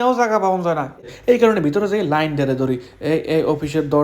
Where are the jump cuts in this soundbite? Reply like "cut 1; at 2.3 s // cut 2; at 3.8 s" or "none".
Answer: cut 1; at 1.0 s

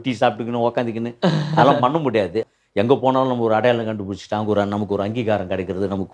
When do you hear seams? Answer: cut 1; at 2.4 s

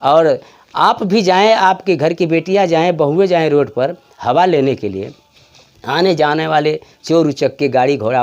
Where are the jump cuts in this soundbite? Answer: none

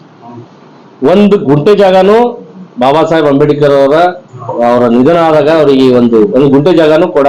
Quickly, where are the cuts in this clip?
none

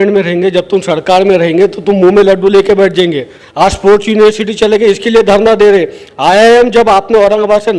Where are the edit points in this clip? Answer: cut 1; at 3.4 s

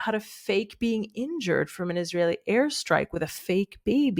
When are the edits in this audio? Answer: none

